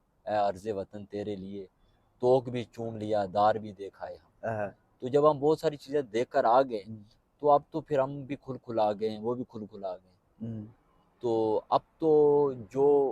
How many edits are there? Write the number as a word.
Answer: zero